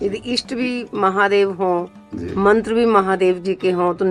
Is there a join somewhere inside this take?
no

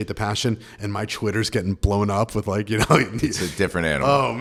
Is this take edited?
no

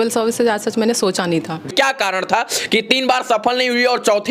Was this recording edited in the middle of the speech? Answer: yes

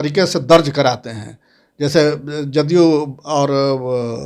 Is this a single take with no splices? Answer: yes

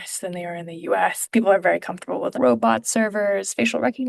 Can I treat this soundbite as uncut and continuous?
no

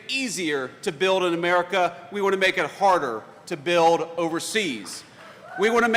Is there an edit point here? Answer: no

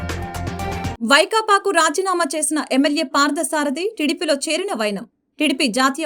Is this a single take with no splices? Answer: no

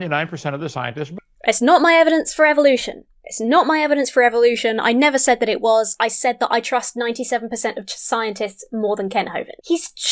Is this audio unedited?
yes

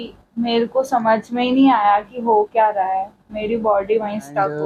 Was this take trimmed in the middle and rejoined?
no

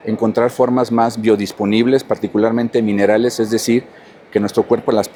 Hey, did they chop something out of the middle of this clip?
no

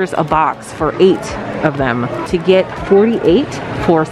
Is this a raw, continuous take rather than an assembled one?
no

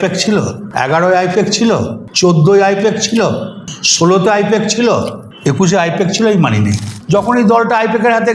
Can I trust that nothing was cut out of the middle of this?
no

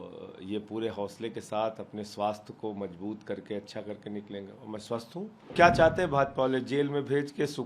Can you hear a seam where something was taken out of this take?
yes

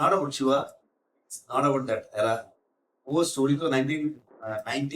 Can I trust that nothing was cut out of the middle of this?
yes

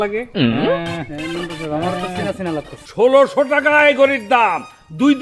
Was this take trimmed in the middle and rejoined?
yes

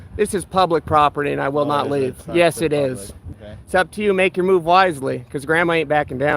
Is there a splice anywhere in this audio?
yes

